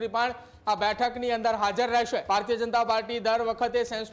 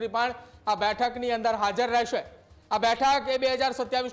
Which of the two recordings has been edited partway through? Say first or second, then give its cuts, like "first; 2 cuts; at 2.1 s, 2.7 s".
first; 1 cut; at 2.2 s